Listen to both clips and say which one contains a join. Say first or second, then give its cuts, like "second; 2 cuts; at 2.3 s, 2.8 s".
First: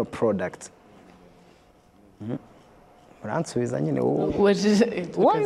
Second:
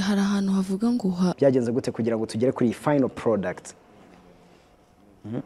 second; 1 cut; at 1.3 s